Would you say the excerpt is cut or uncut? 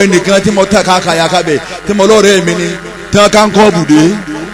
uncut